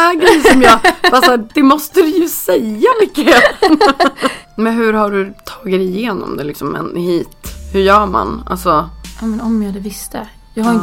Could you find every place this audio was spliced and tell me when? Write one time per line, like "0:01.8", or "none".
0:04.4